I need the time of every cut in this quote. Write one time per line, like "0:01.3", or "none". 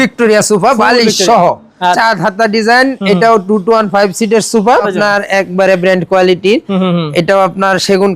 0:02.0
0:04.9